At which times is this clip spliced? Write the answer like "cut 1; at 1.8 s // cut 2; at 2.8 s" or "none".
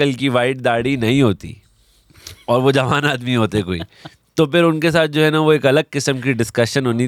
none